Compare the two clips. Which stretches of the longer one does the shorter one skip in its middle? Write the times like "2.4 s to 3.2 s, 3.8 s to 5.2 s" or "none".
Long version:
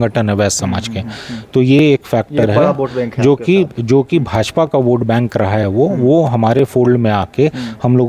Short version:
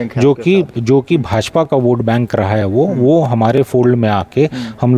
none